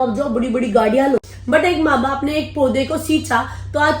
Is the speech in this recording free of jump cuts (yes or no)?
no